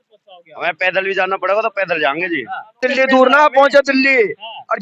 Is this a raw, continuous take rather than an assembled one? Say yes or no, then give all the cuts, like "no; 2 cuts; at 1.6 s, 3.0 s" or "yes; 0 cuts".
no; 1 cut; at 2.8 s